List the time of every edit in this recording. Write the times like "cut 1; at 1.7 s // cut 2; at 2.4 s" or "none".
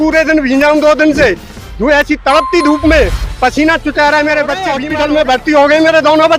cut 1; at 4.8 s